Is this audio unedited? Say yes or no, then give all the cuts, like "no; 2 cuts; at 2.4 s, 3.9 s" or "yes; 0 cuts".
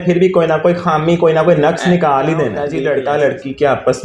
no; 1 cut; at 2.7 s